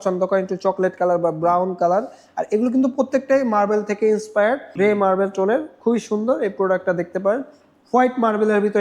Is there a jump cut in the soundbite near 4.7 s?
yes; 1 cut; at 4.7 s

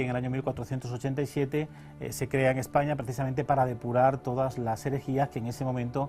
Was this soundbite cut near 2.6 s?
no; 1 cut; at 4.6 s

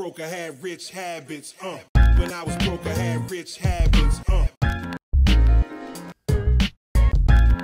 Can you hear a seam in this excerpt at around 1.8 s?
no; 0 cuts

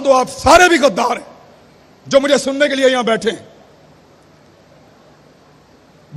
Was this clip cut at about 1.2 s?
no; 0 cuts

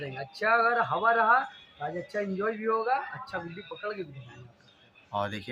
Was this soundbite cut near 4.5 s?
no; 0 cuts

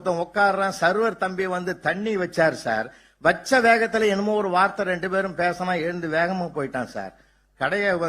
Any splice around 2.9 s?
no; 0 cuts

